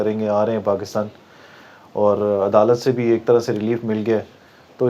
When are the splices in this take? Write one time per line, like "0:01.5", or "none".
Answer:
none